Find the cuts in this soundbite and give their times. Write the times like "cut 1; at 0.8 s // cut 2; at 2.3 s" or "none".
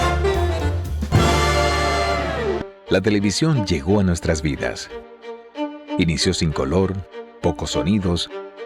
cut 1; at 2.7 s